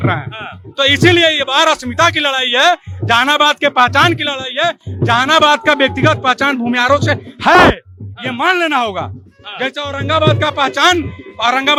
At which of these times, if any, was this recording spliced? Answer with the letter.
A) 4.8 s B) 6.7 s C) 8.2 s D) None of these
D